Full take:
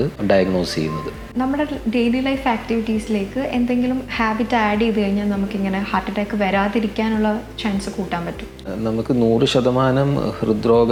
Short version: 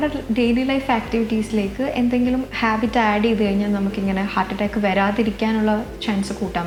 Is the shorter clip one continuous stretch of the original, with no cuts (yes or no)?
yes